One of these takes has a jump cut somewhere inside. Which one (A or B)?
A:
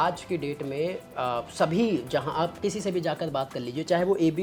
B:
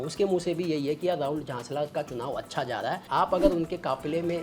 B